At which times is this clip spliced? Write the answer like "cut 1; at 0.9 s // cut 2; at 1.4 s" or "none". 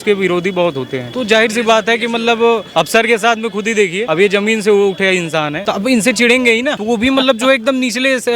cut 1; at 1.0 s // cut 2; at 2.7 s // cut 3; at 4.0 s // cut 4; at 5.6 s // cut 5; at 6.8 s